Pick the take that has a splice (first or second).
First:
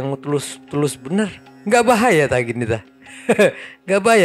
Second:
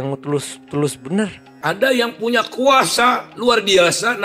second